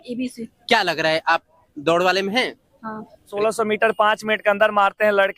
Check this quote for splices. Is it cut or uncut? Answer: cut